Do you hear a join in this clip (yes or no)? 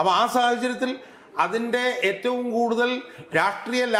no